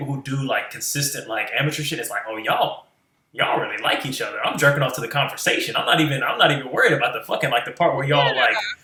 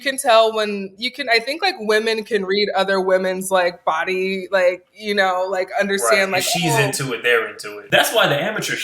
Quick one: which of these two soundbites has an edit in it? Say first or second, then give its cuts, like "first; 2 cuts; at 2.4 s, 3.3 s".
second; 1 cut; at 7.8 s